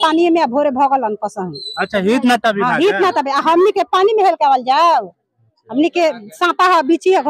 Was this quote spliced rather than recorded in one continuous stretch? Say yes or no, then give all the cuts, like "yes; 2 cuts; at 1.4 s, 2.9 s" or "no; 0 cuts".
no; 0 cuts